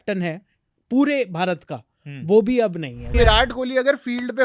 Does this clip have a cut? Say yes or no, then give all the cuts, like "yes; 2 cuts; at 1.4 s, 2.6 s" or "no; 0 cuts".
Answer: yes; 1 cut; at 3.1 s